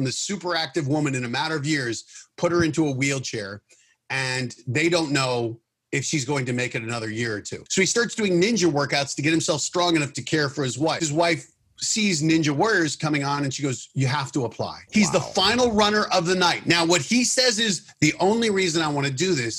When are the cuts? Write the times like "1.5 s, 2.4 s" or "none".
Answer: 7.6 s, 11.0 s, 14.7 s